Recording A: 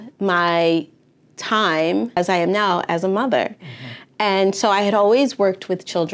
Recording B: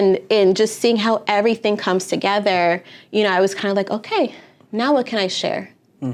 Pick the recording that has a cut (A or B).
A